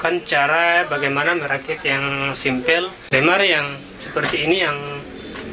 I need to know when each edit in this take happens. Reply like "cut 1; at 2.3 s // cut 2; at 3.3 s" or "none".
cut 1; at 3.0 s